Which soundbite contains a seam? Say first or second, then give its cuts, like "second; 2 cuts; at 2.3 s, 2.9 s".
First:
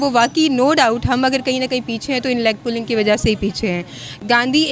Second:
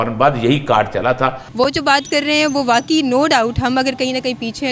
second; 1 cut; at 1.4 s